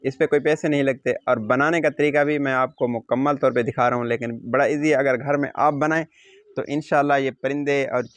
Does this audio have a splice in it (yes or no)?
no